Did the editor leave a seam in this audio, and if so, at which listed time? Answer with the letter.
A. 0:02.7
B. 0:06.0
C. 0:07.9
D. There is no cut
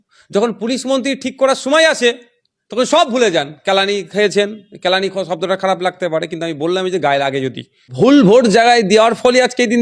C